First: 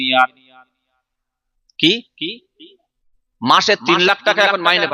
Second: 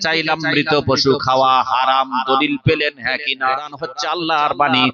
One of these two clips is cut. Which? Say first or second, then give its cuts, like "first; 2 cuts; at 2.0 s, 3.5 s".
second; 1 cut; at 3.9 s